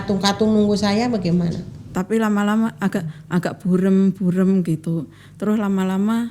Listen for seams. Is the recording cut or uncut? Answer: cut